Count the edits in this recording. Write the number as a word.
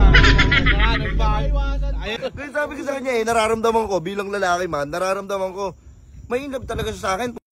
one